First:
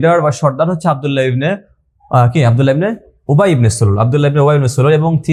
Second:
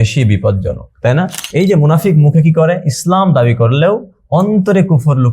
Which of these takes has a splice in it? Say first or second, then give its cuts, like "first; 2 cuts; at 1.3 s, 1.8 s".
second; 1 cut; at 1.4 s